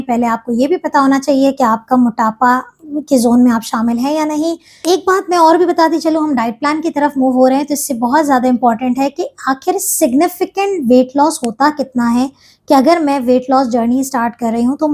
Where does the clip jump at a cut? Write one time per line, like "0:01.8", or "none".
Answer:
0:04.8